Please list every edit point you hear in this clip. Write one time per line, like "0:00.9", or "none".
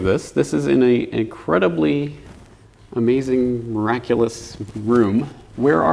0:03.7